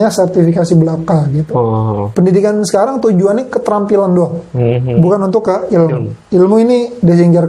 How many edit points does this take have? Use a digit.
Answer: 1